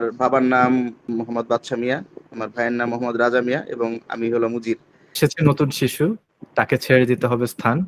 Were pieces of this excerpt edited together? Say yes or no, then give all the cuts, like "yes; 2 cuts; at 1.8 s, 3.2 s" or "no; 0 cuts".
yes; 2 cuts; at 1.0 s, 5.2 s